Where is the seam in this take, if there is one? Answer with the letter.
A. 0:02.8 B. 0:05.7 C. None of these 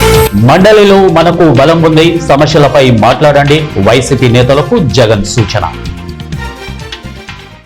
B